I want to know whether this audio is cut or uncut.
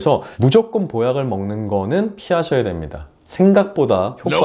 uncut